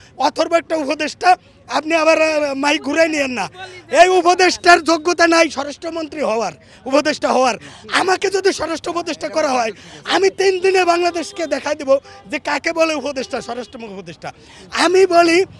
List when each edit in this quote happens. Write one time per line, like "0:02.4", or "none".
none